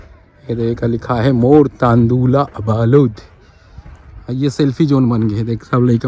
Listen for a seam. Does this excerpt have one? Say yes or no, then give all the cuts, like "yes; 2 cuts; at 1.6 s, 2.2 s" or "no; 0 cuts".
no; 0 cuts